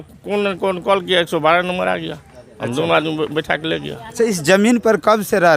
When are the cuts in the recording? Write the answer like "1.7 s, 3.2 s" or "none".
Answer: none